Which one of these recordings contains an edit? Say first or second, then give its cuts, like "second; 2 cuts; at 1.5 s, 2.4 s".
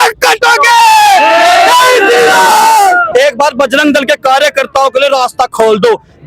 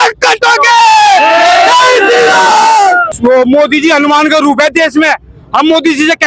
first; 1 cut; at 3.1 s